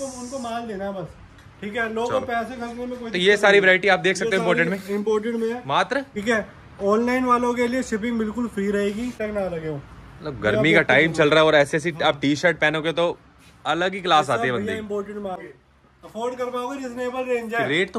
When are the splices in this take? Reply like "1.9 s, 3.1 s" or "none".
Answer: 6.2 s, 9.2 s, 15.4 s